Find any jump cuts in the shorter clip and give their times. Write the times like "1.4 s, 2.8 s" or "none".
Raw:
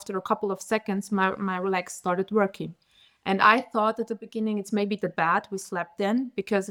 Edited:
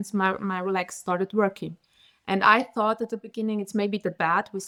none